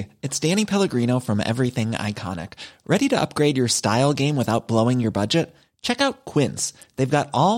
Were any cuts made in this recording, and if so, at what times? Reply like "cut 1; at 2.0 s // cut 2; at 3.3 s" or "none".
none